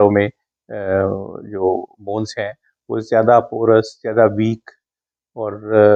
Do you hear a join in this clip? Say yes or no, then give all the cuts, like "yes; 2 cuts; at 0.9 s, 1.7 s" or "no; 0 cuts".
no; 0 cuts